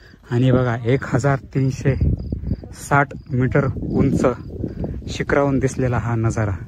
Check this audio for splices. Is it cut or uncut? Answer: uncut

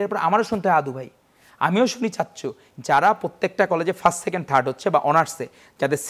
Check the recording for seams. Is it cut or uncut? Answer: cut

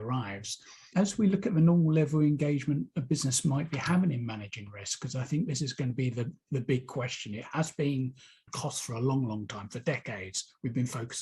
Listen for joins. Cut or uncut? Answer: cut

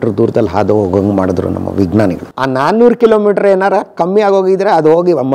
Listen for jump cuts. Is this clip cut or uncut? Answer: cut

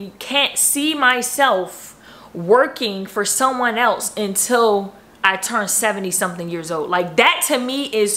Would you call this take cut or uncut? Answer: uncut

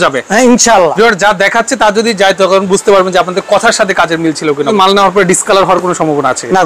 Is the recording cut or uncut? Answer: cut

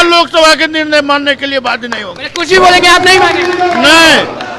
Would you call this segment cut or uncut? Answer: uncut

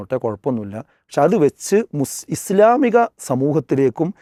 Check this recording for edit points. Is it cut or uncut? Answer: uncut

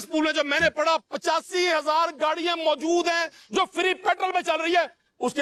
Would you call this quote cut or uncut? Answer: uncut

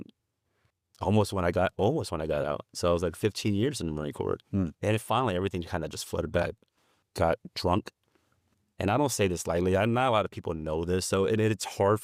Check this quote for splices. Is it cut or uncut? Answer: uncut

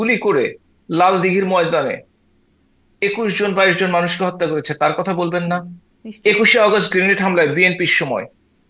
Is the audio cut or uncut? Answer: uncut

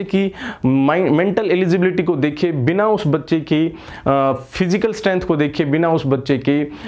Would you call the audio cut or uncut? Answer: uncut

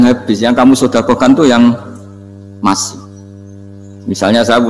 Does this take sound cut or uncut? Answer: uncut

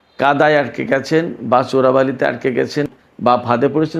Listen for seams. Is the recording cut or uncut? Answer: cut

